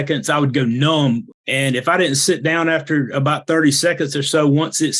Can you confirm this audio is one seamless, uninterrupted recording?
no; 1 cut; at 1.3 s

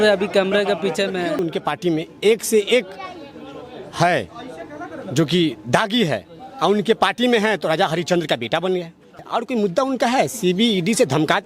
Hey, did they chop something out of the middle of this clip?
yes; 2 cuts; at 1.4 s, 9.2 s

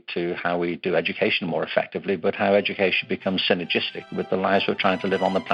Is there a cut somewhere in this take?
no; 0 cuts

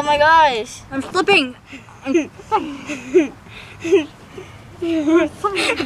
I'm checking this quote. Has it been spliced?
no; 0 cuts

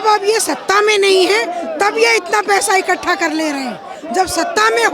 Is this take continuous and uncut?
yes; 0 cuts

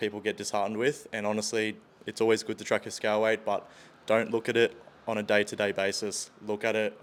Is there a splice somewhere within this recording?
no; 0 cuts

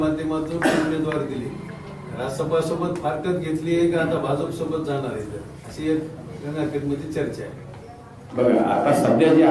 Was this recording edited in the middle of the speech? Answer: no; 0 cuts

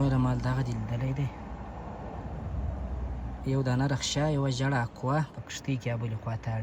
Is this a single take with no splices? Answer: yes; 0 cuts

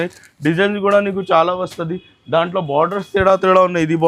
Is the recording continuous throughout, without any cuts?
yes; 0 cuts

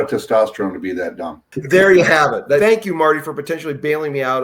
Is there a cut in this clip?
yes; 2 cuts; at 1.5 s, 2.6 s

